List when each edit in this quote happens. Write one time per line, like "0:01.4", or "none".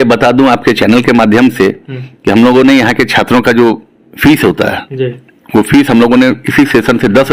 none